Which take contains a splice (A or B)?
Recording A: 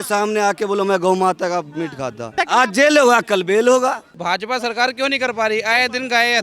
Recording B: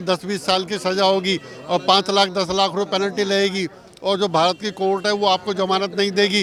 A